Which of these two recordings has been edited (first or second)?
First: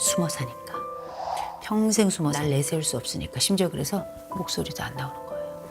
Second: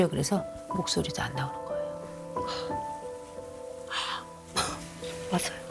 first